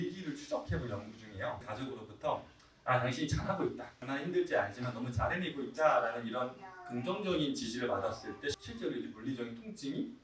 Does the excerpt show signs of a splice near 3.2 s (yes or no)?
no